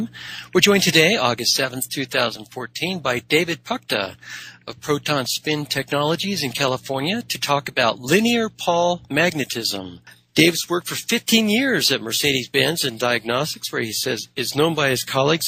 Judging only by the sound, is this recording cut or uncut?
uncut